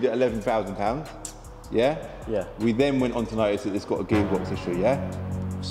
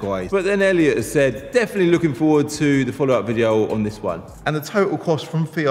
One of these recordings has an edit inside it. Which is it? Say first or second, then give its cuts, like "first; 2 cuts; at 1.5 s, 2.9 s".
second; 1 cut; at 4.3 s